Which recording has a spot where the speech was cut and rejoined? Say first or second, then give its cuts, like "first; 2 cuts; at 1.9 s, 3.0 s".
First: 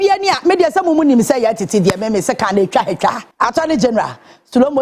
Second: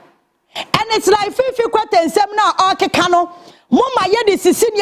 first; 1 cut; at 3.3 s